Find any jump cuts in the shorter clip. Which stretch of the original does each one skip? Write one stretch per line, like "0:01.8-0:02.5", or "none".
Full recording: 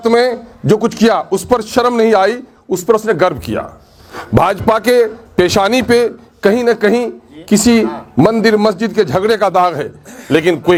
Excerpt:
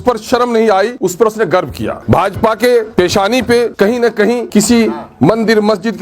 0:02.4-0:02.6
0:03.7-0:04.2
0:05.1-0:05.3
0:06.4-0:07.0